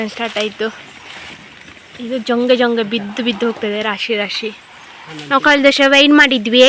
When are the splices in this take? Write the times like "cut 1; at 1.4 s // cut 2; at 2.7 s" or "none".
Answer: none